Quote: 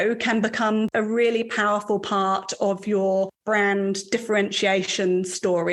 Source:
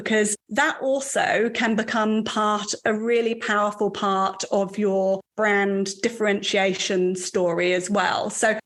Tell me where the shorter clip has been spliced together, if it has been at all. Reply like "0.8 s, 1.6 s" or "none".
0.9 s